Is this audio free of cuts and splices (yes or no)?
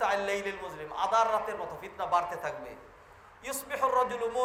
yes